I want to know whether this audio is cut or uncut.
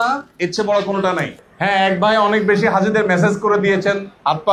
cut